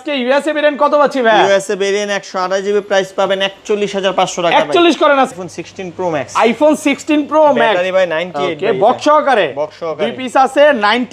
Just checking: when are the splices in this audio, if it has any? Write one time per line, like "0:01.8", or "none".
0:05.3